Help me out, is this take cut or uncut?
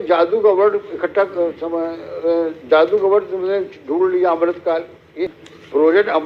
cut